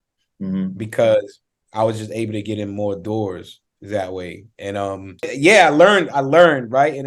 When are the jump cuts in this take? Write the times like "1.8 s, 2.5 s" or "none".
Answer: 5.3 s